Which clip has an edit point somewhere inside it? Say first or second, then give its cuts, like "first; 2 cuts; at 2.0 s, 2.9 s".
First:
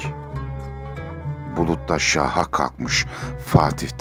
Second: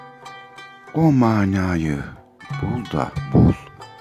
second; 1 cut; at 0.9 s